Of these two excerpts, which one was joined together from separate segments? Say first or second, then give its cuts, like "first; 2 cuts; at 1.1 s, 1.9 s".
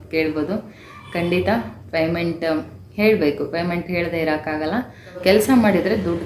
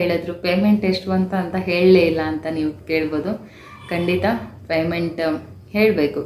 first; 1 cut; at 5.2 s